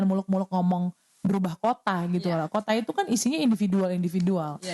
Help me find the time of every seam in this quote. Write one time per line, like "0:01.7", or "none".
none